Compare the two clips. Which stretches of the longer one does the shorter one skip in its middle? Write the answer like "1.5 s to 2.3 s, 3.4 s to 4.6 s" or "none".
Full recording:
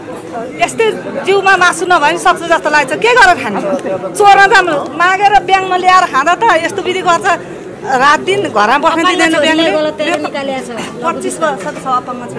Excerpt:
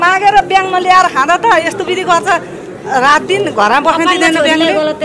none